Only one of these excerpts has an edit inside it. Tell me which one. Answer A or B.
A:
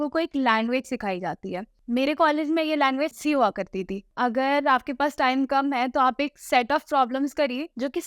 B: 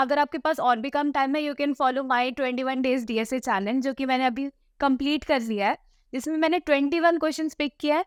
A